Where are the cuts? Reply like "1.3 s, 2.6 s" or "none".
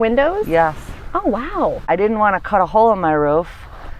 1.8 s